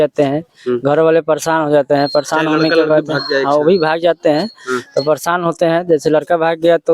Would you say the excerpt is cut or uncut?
uncut